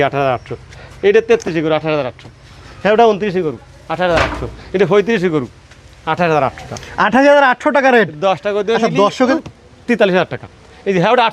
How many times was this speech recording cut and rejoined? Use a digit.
1